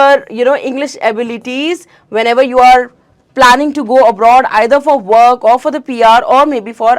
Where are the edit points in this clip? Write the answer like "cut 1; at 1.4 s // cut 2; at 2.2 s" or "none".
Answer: none